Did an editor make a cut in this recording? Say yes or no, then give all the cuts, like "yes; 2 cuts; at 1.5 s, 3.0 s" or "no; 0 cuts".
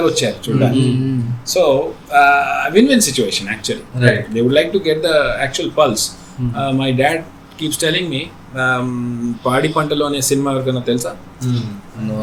no; 0 cuts